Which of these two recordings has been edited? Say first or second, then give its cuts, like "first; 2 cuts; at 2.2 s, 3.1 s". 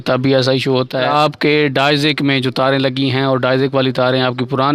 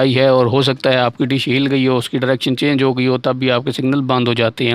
first; 1 cut; at 1.1 s